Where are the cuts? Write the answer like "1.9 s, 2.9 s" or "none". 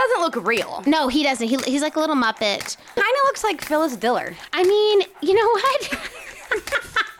3.0 s